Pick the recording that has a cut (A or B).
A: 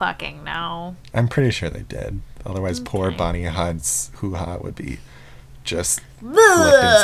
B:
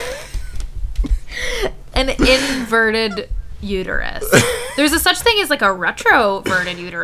B